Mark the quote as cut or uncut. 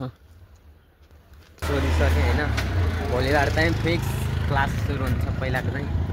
cut